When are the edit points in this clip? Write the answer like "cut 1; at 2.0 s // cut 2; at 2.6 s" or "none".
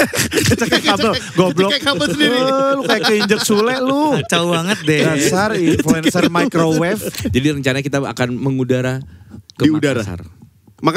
cut 1; at 7.2 s